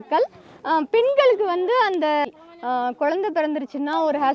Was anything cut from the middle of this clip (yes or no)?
yes